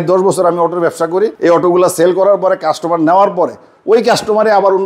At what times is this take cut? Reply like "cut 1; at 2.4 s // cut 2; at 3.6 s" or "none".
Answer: none